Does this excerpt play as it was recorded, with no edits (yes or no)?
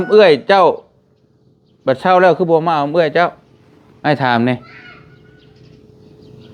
yes